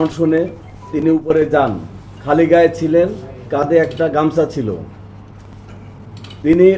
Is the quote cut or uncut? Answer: uncut